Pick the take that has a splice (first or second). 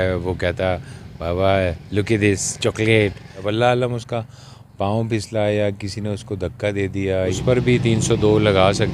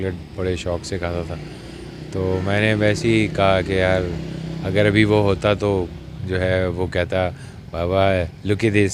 first